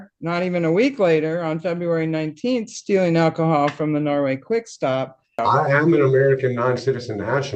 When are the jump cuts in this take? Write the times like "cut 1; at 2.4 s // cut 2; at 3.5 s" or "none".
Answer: cut 1; at 5.4 s